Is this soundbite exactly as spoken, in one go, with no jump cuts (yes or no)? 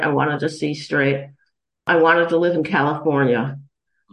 no